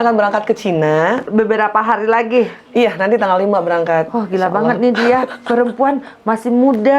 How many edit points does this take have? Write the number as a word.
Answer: one